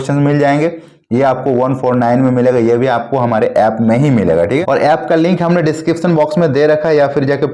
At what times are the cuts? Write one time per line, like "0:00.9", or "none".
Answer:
0:04.6